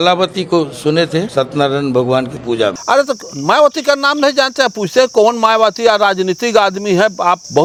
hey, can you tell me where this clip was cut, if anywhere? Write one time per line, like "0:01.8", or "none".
none